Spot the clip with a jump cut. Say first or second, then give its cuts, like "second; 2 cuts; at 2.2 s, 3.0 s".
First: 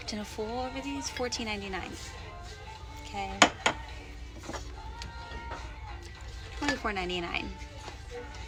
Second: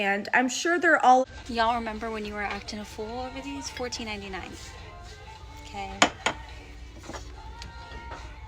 second; 1 cut; at 1.2 s